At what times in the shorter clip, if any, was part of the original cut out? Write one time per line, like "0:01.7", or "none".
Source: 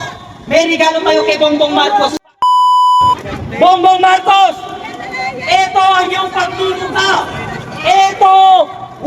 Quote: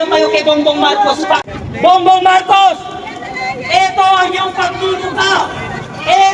0:01.4